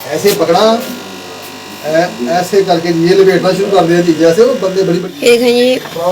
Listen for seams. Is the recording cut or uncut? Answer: cut